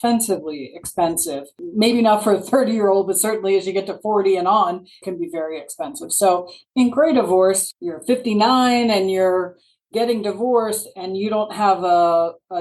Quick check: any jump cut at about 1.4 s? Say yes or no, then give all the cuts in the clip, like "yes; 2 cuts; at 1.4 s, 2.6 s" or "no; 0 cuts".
no; 2 cuts; at 5.0 s, 7.7 s